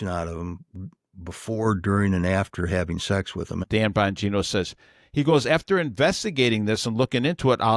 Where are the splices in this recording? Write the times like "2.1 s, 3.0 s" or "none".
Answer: 3.6 s